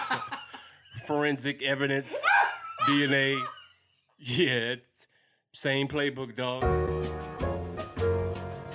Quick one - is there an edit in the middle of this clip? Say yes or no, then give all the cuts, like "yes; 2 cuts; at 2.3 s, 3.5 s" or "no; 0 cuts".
yes; 1 cut; at 6.6 s